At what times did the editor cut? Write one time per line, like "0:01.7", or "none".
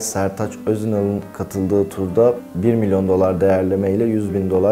none